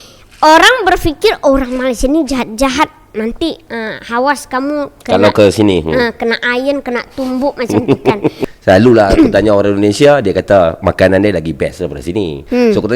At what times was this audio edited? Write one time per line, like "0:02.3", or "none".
0:08.5